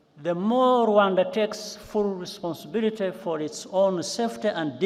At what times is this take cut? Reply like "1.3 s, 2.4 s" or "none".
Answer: none